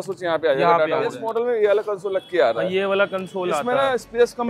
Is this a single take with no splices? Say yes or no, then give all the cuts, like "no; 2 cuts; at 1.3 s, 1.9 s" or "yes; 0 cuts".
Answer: no; 1 cut; at 1.2 s